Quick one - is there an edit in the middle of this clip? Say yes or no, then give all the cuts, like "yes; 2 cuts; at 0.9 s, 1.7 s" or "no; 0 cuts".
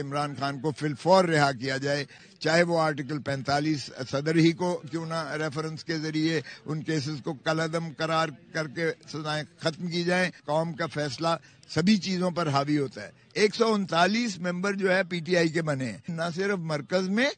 no; 0 cuts